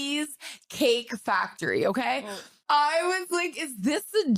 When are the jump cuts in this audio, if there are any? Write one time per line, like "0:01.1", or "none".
0:02.6